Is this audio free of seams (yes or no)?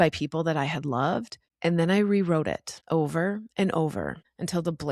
yes